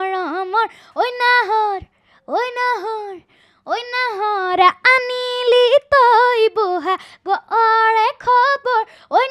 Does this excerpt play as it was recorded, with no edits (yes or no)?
yes